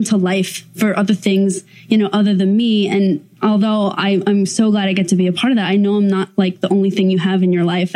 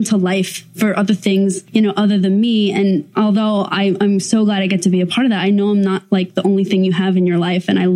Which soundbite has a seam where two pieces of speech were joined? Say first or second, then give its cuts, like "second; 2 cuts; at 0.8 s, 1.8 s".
second; 2 cuts; at 1.6 s, 3.1 s